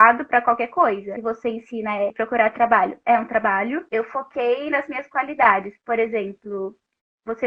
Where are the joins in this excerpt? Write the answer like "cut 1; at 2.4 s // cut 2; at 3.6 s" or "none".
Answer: cut 1; at 1.1 s // cut 2; at 2.1 s // cut 3; at 3.9 s